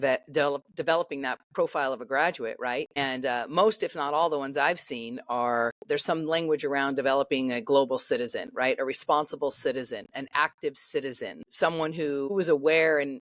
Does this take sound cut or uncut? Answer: cut